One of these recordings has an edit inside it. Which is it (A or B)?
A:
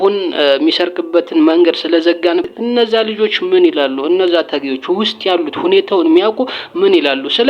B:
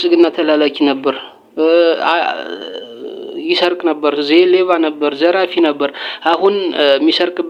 A